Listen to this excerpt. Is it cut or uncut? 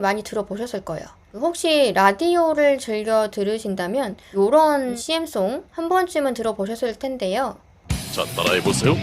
cut